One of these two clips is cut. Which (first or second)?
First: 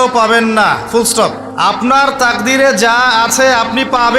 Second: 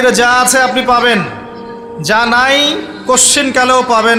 first